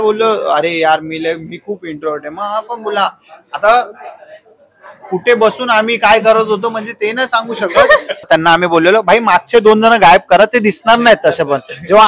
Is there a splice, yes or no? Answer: yes